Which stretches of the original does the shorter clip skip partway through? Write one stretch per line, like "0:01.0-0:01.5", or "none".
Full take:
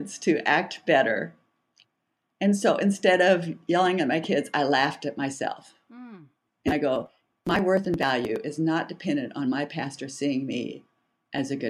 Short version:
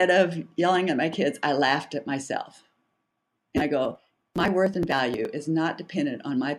none